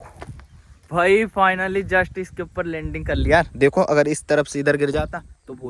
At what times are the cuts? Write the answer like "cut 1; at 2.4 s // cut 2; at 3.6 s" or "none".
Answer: none